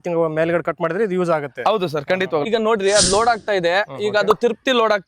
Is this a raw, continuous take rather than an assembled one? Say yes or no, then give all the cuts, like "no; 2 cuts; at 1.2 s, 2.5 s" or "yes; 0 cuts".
no; 1 cut; at 2.5 s